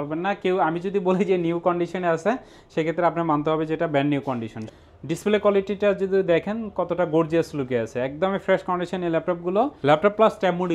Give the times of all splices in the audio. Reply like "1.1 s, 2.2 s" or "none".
4.8 s, 9.8 s